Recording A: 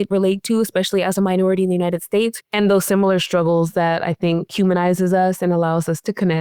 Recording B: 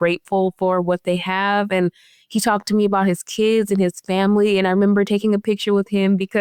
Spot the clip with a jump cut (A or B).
A